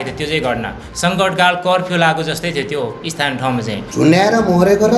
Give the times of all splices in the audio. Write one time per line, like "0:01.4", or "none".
0:03.8